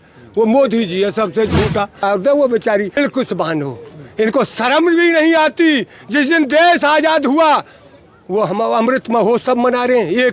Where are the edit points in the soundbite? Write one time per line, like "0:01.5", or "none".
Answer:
0:02.0
0:03.0